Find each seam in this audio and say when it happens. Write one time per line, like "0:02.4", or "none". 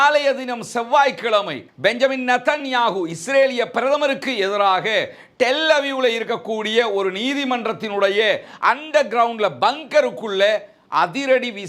none

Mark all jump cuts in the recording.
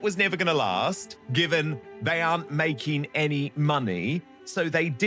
0:01.1
0:01.9

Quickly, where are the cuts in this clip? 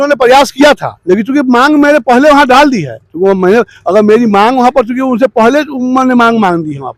none

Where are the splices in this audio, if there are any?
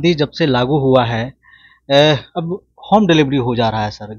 none

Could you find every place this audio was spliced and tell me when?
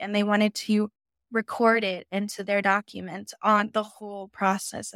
none

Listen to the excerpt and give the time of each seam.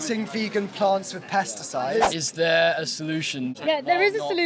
0:02.1
0:03.6

